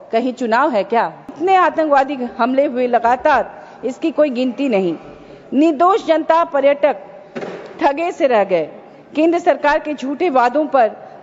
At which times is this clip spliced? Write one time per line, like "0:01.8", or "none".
0:01.3

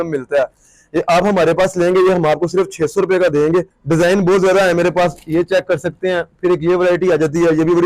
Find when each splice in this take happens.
0:03.8

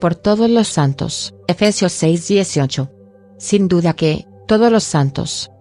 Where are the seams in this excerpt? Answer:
0:02.8

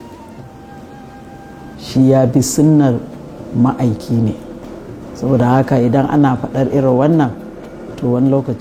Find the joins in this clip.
none

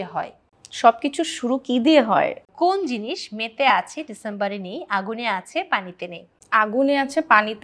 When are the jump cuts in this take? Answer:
0:02.5
0:06.3

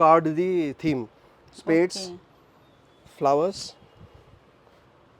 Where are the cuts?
none

